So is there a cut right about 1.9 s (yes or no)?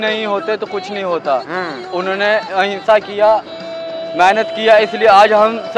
no